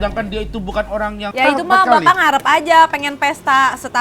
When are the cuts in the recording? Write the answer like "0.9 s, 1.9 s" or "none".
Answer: 1.3 s

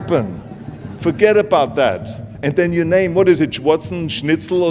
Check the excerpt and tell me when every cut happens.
none

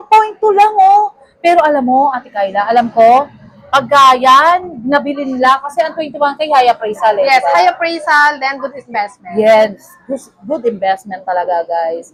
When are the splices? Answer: none

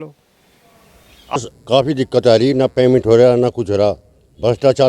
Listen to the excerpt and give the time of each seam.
1.4 s

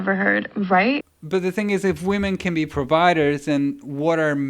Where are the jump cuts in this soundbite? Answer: 1.0 s, 3.4 s

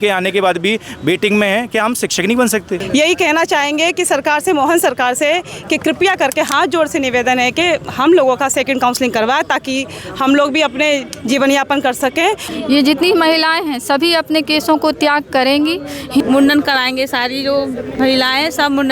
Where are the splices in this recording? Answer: 2.8 s, 12.4 s, 16.2 s

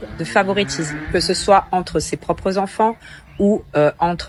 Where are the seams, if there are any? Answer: none

